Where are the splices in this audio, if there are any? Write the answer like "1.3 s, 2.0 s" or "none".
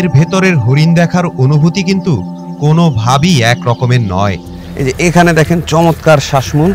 4.6 s